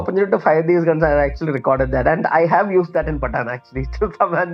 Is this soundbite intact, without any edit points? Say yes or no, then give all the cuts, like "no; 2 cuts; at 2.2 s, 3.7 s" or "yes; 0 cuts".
yes; 0 cuts